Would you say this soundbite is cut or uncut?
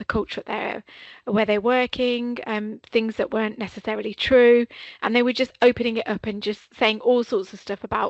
uncut